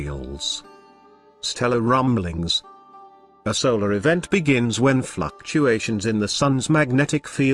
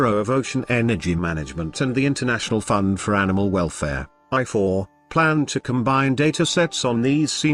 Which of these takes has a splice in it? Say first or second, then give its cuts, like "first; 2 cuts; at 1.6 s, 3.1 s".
first; 1 cut; at 6.3 s